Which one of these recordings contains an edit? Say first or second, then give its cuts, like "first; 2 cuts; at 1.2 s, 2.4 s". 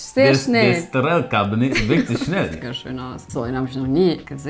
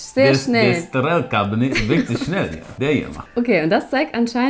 first; 1 cut; at 2.7 s